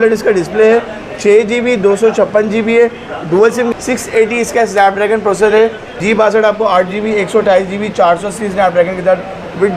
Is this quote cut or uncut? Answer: cut